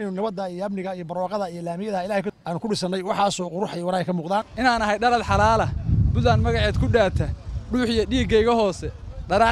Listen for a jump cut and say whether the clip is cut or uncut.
cut